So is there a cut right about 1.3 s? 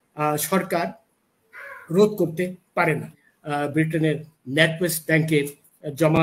no; 1 cut; at 3.2 s

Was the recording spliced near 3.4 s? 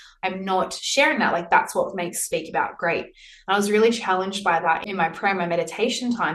no; 1 cut; at 4.9 s

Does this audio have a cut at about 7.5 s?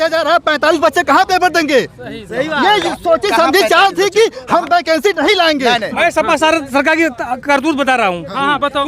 no; 1 cut; at 5.9 s

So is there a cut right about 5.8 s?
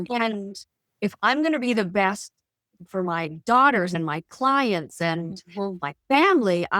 no; 1 cut; at 3.9 s

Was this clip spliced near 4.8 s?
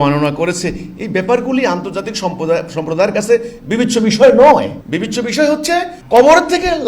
yes; 2 cuts; at 4.8 s, 6.0 s

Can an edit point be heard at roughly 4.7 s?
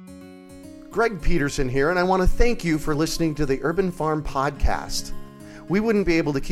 no; 1 cut; at 0.9 s

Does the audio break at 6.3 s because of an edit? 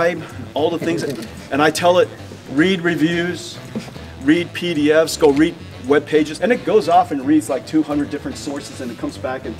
yes; 2 cuts; at 3.9 s, 6.3 s

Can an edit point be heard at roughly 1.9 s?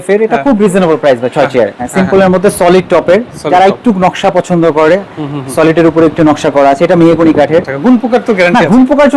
yes; 2 cuts; at 1.9 s, 7.7 s

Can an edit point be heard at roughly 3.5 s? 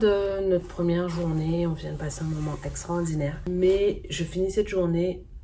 yes; 1 cut; at 3.5 s

